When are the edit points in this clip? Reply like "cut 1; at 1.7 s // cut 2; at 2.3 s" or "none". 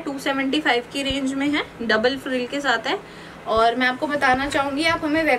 none